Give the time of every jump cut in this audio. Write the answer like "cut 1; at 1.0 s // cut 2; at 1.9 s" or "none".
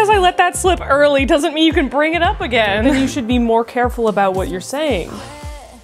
none